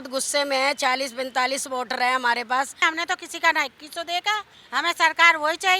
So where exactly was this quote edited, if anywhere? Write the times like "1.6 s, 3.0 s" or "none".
2.8 s, 4.6 s